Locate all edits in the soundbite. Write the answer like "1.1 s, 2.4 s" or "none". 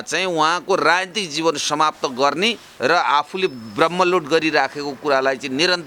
none